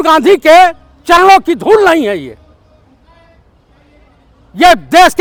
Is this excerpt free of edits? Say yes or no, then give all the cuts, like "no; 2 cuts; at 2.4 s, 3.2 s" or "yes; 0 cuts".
yes; 0 cuts